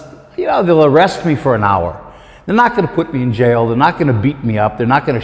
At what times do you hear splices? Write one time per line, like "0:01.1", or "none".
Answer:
none